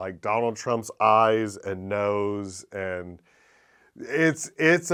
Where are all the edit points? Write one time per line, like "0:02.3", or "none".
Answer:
none